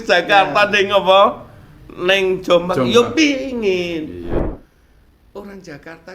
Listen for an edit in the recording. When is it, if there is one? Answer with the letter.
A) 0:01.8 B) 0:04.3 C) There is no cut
B